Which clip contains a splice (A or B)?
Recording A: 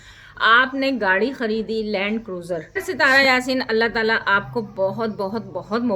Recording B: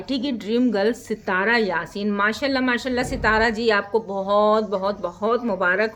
A